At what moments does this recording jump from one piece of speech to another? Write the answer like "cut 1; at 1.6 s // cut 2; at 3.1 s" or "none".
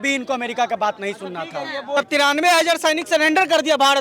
cut 1; at 2.0 s